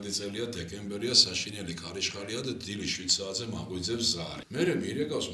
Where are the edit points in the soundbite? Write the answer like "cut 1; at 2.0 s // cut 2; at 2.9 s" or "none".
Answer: cut 1; at 4.3 s